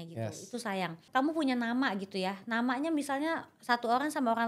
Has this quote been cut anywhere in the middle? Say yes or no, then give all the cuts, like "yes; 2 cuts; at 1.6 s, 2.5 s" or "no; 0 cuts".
yes; 1 cut; at 1.0 s